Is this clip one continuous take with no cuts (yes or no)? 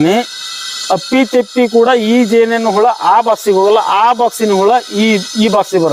yes